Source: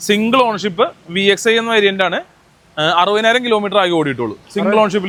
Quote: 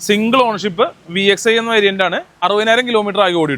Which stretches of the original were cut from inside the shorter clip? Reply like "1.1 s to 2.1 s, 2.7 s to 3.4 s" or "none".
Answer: 2.4 s to 3.0 s